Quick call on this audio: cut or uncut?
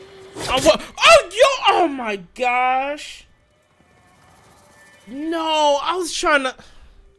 uncut